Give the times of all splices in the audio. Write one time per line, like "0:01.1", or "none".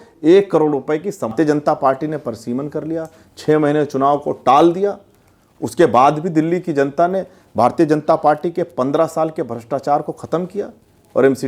0:01.3